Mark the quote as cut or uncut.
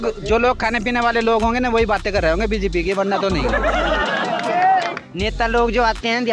uncut